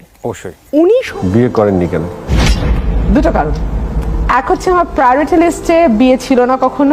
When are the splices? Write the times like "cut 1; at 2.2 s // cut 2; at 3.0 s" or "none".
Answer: cut 1; at 1.1 s

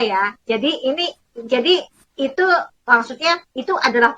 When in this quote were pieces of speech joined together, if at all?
none

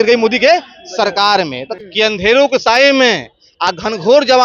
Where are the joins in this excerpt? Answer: cut 1; at 1.6 s

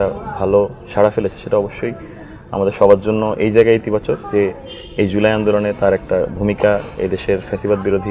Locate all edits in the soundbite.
none

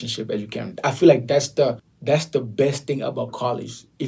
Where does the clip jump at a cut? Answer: cut 1; at 1.9 s

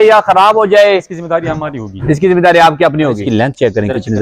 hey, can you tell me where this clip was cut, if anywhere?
cut 1; at 3.2 s

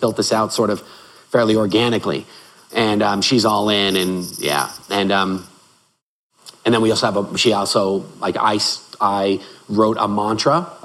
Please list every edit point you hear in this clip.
none

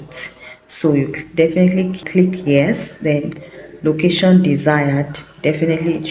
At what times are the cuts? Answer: cut 1; at 2.0 s

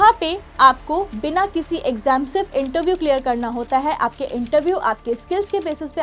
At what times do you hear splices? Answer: none

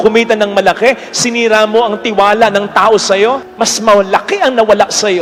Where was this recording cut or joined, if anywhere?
none

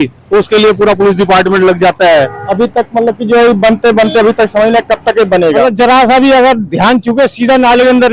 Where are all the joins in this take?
cut 1; at 2.4 s // cut 2; at 5.6 s

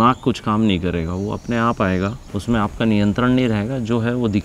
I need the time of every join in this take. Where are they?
cut 1; at 2.2 s

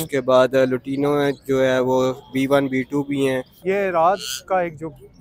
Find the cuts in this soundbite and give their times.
cut 1; at 3.5 s

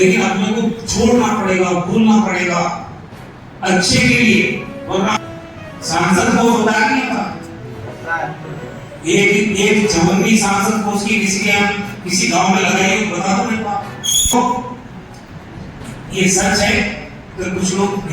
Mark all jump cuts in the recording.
cut 1; at 5.2 s // cut 2; at 14.3 s

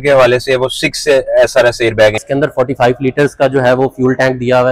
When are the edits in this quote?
cut 1; at 2.2 s

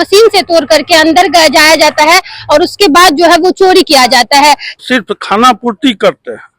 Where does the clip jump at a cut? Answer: cut 1; at 4.8 s

